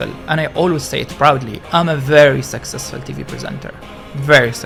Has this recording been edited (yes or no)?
no